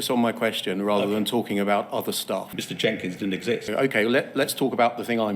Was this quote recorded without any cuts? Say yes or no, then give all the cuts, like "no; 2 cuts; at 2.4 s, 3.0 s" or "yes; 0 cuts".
no; 2 cuts; at 2.6 s, 3.6 s